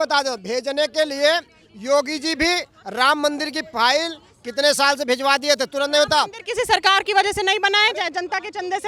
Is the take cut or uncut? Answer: uncut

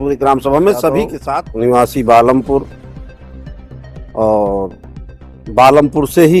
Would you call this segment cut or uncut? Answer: cut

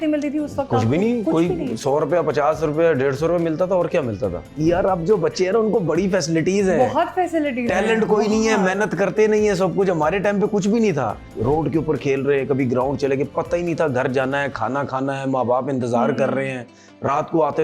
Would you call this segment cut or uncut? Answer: cut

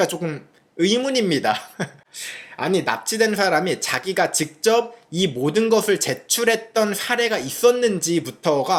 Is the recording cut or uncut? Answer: uncut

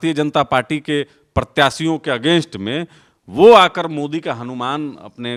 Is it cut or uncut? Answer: uncut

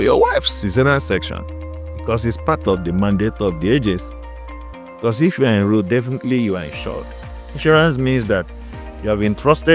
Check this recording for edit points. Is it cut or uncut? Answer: uncut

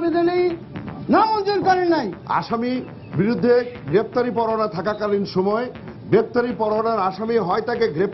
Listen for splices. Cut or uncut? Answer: cut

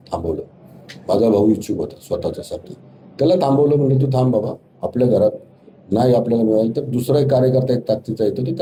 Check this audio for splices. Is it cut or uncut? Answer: uncut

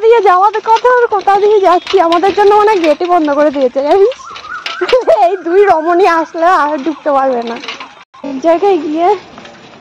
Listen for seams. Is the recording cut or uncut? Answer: cut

